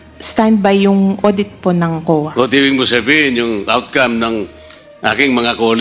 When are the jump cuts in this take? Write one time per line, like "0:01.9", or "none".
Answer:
none